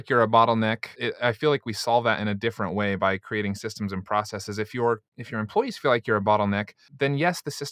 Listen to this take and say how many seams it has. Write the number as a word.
two